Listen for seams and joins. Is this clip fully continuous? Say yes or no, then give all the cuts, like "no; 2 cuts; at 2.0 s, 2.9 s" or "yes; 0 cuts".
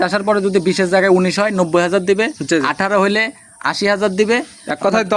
yes; 0 cuts